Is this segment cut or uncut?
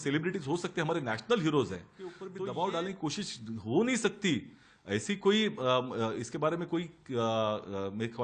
cut